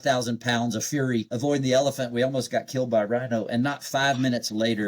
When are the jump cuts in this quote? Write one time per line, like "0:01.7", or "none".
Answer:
0:01.3